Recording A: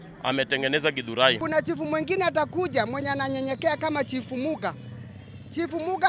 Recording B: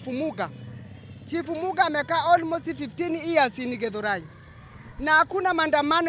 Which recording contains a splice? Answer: A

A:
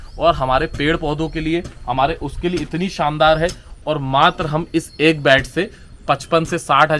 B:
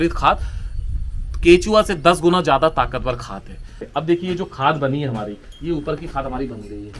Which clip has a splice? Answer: B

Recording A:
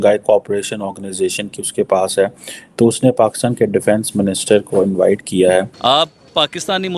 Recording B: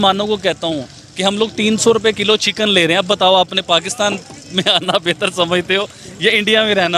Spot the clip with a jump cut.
A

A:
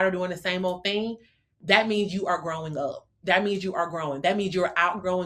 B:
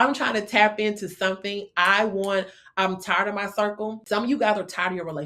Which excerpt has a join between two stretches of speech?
B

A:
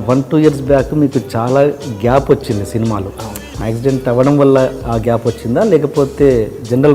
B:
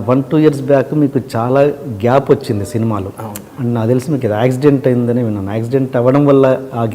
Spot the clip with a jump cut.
A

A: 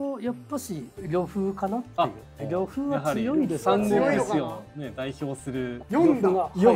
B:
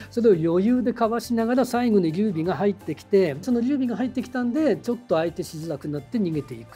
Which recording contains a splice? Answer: A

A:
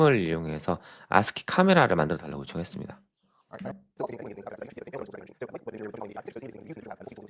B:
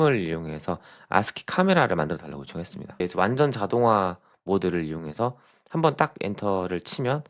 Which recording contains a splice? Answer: B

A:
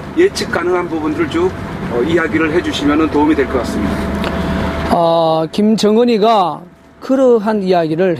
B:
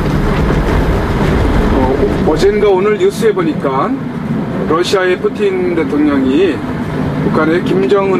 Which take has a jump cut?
A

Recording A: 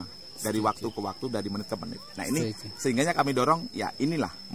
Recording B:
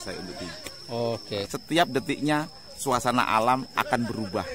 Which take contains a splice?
B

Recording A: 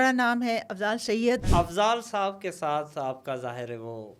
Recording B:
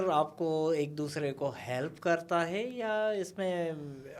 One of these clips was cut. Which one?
A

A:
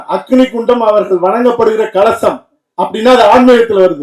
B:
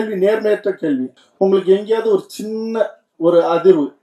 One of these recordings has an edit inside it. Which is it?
B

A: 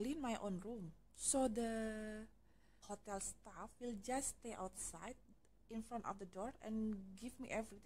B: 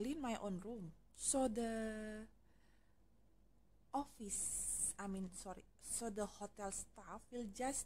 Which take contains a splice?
A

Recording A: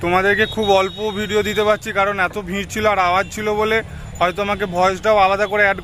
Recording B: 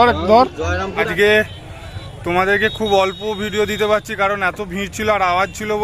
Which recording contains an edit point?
B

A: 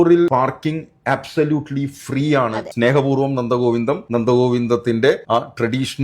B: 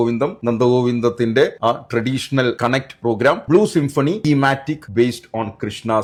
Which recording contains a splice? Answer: A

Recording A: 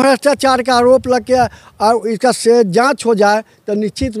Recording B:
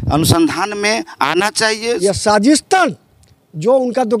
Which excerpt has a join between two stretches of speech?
B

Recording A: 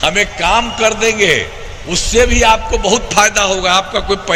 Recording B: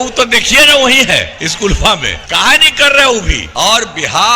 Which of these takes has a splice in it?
B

